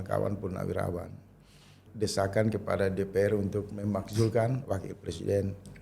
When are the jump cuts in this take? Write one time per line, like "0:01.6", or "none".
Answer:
0:01.8